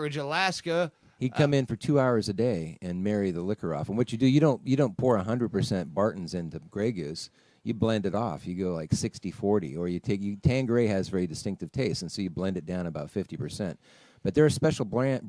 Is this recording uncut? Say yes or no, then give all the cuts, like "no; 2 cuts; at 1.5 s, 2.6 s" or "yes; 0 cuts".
yes; 0 cuts